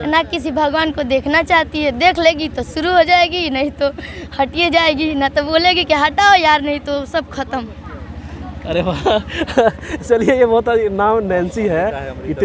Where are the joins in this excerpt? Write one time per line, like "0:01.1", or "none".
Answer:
none

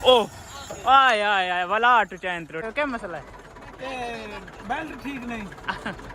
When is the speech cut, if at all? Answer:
0:02.6

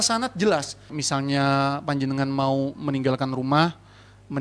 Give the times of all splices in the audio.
0:01.0

